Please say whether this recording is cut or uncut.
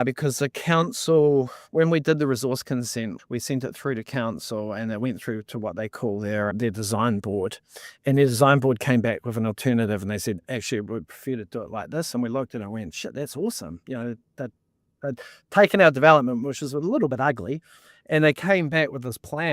cut